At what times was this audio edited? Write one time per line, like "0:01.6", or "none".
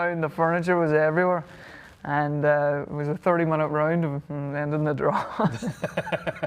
none